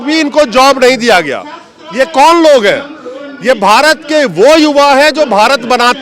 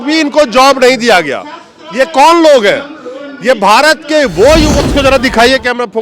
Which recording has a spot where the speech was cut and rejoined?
second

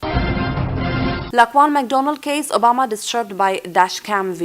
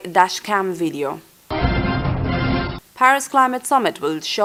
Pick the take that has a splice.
first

